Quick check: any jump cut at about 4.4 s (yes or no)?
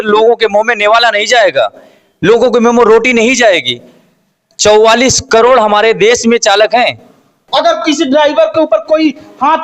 no